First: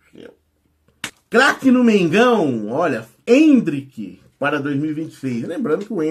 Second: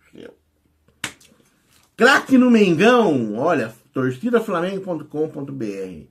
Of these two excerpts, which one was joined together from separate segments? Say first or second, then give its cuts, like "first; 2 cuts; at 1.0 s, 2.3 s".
first; 2 cuts; at 1.2 s, 3.1 s